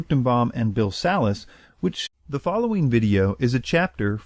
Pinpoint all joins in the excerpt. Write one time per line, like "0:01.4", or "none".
none